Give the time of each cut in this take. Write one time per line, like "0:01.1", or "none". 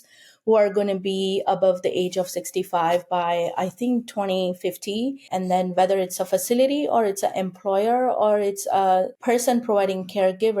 0:05.3
0:09.1